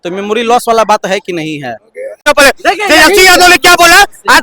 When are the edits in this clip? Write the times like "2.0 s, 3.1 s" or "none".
2.2 s